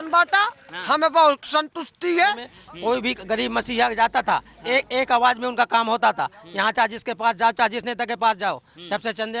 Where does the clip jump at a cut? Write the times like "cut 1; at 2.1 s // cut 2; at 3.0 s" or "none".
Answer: cut 1; at 2.5 s